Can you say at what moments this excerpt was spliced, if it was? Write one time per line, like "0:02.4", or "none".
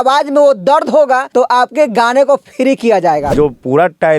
0:01.3
0:03.3